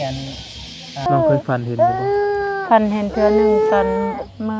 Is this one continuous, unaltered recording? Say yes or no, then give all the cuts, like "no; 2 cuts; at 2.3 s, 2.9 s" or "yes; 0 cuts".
no; 1 cut; at 1.1 s